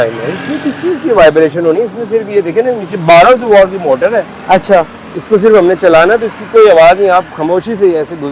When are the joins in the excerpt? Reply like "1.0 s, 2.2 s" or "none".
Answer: none